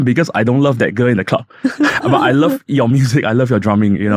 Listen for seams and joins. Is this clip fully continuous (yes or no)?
yes